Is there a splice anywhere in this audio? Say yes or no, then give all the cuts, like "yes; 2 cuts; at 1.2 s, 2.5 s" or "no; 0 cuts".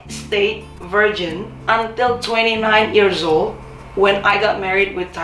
no; 0 cuts